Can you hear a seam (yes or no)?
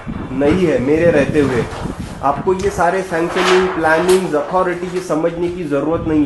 no